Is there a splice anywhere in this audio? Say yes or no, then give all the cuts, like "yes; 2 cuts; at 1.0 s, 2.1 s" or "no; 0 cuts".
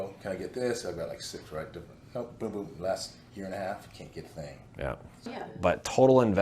yes; 1 cut; at 5.3 s